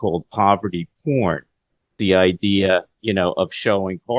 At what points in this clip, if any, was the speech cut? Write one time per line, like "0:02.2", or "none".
none